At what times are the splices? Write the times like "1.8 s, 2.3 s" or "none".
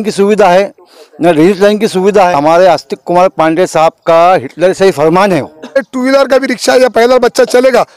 2.3 s, 5.8 s